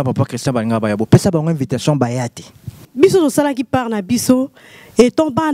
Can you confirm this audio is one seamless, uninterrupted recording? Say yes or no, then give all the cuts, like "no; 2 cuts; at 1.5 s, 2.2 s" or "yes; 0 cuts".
no; 1 cut; at 2.8 s